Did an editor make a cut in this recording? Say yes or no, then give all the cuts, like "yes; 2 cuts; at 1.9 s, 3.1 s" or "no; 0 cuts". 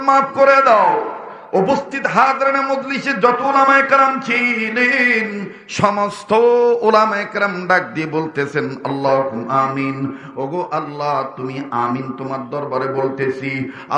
no; 0 cuts